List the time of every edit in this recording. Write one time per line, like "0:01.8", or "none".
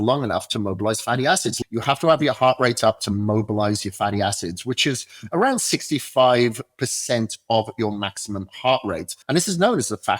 0:01.6
0:09.1